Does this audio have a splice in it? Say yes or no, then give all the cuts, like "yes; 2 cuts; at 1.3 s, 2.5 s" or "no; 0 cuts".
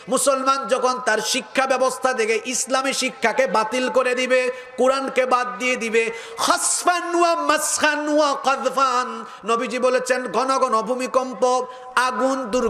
no; 0 cuts